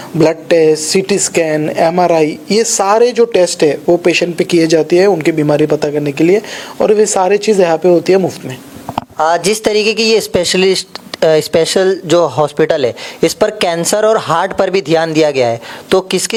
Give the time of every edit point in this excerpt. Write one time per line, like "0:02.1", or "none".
none